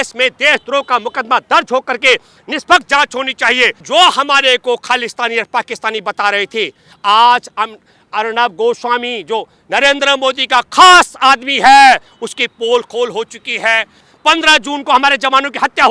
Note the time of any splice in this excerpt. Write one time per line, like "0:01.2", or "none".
0:03.8
0:14.0